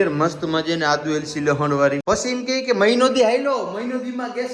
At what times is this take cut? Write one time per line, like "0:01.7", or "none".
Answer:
0:02.0